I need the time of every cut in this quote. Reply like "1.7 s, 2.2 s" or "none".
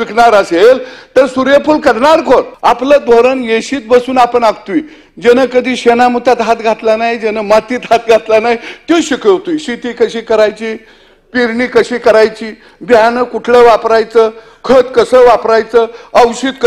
2.5 s